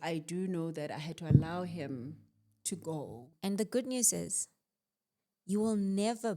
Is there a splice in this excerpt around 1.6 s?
no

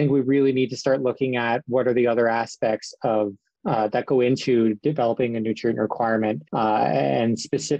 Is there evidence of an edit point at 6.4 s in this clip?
yes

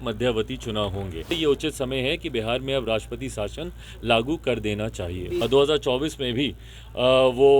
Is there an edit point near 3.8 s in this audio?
no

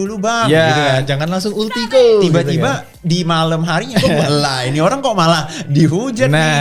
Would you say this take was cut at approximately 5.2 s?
no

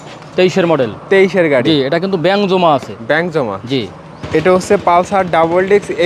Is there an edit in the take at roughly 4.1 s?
yes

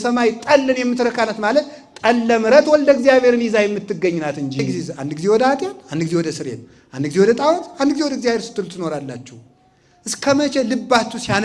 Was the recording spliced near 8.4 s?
no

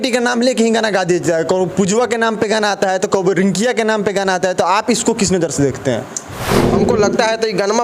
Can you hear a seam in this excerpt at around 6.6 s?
yes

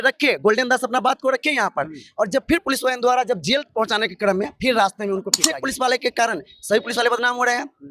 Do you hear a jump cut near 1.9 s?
no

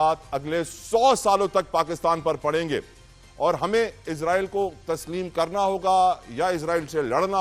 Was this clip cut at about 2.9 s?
no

